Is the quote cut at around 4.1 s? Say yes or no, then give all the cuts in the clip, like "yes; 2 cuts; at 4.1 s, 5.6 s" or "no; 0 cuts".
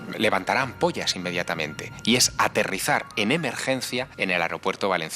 yes; 1 cut; at 4.1 s